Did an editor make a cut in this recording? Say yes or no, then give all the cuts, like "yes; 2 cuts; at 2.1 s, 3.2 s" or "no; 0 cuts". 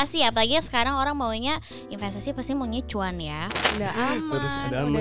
yes; 1 cut; at 3.7 s